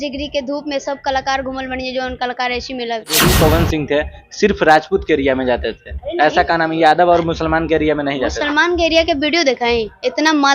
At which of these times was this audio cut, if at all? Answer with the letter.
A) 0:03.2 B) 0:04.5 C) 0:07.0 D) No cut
A